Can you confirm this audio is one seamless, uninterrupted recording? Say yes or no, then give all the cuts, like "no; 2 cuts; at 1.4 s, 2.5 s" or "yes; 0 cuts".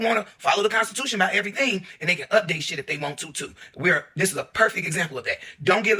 yes; 0 cuts